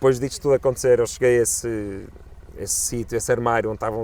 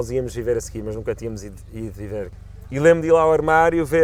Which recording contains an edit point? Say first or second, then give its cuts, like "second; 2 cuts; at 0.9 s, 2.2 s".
second; 1 cut; at 2.3 s